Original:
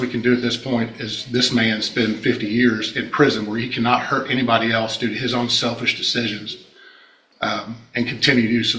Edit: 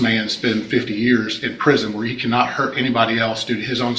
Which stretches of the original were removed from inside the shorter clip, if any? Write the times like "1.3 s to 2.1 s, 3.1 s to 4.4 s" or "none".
none